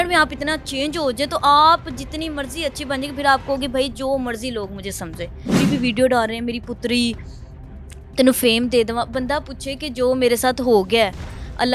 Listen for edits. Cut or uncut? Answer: cut